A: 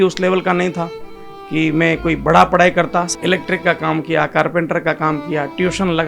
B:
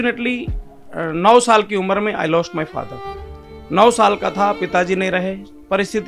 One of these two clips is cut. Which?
A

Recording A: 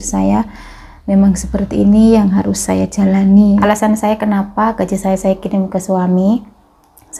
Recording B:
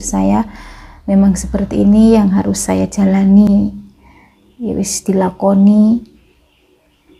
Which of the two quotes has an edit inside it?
A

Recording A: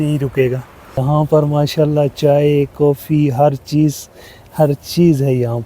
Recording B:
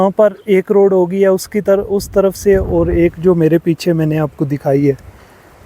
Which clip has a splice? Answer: A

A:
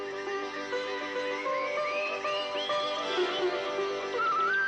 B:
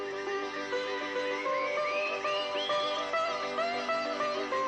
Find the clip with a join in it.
A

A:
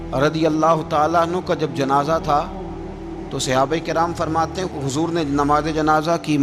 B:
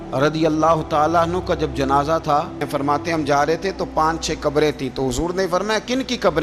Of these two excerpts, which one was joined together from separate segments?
B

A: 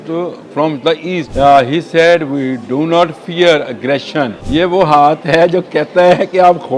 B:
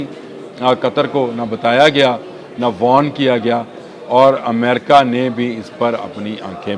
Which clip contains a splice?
A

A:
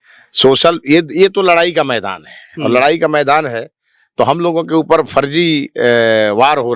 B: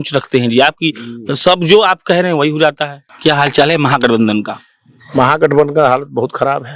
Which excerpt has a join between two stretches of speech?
B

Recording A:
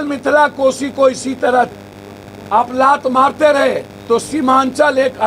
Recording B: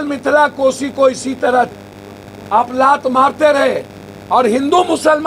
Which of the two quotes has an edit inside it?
A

